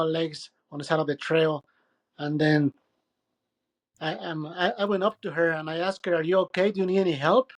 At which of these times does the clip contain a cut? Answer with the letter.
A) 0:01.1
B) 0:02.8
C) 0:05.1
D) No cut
D